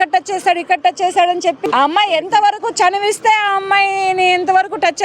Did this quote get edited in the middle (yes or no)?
yes